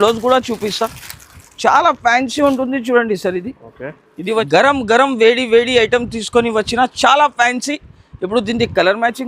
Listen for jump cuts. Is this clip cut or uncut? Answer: cut